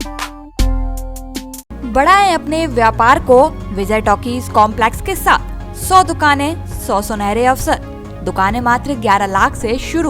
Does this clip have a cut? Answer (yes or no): no